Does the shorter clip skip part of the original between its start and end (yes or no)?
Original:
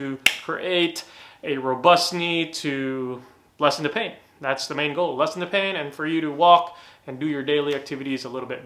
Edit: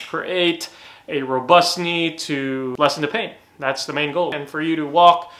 yes